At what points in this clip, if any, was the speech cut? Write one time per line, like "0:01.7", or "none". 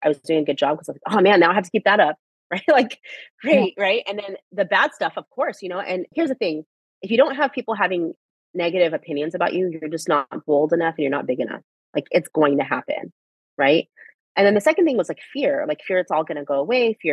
0:06.1